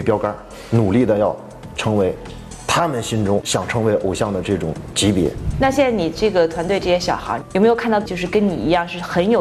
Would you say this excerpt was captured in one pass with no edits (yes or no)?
no